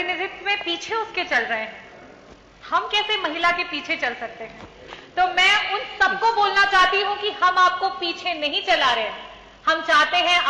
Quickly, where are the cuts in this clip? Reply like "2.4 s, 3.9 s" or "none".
none